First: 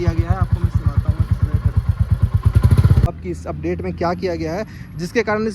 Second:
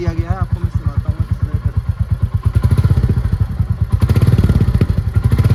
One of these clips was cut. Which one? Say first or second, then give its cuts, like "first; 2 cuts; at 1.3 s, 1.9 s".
first; 1 cut; at 3.1 s